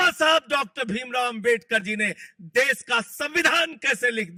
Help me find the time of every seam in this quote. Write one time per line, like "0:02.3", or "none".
none